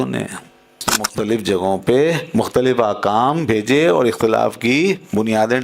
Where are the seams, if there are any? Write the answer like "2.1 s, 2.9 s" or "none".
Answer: 1.1 s